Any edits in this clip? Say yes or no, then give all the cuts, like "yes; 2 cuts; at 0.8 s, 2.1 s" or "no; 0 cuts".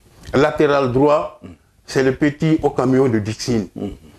no; 0 cuts